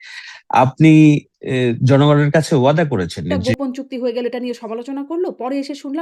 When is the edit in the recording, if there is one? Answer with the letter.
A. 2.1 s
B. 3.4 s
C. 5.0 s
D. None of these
B